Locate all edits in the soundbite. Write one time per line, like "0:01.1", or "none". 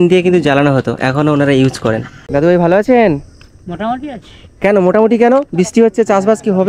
0:02.2

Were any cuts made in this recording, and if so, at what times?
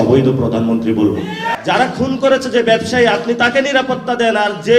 0:01.5

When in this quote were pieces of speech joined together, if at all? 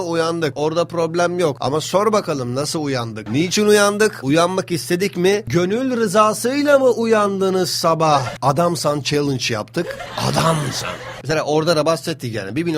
0:03.2
0:08.3

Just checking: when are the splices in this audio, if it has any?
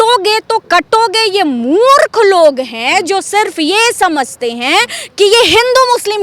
none

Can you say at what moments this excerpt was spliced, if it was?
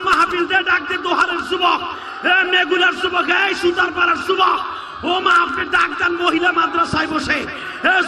none

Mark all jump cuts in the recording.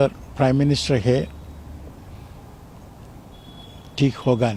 none

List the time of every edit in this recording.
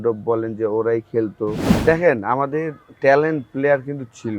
0:01.7

